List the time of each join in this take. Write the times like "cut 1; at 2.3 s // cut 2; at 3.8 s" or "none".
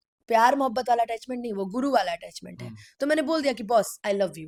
none